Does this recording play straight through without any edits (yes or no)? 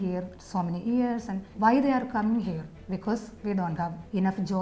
yes